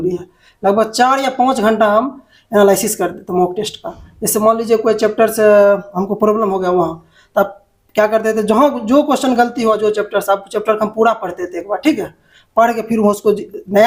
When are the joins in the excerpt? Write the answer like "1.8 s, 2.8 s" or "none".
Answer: none

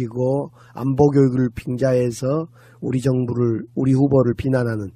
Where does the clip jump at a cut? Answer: none

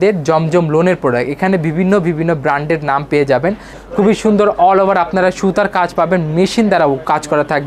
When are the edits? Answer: 3.7 s

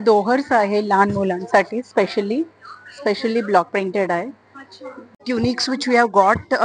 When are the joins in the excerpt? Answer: 5.2 s

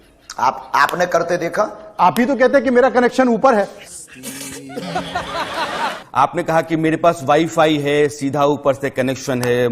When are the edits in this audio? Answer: 5.9 s

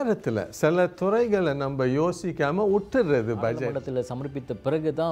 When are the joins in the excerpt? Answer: 3.7 s

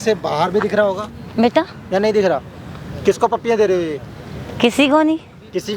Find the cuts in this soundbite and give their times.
none

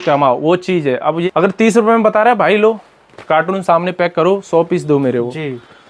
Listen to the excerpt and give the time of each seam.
1.2 s

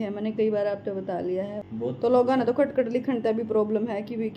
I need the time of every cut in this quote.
1.6 s

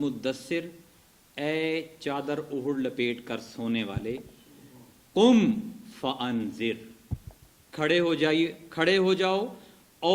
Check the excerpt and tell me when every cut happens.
none

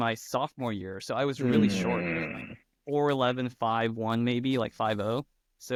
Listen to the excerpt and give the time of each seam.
none

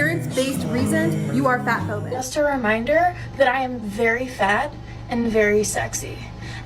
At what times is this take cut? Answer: 2.2 s

